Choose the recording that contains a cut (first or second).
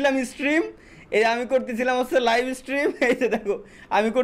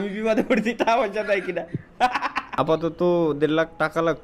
second